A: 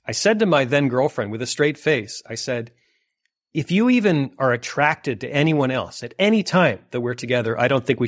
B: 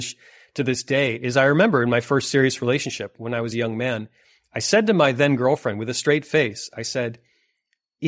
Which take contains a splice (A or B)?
B